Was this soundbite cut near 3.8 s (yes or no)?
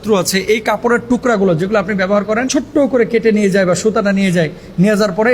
no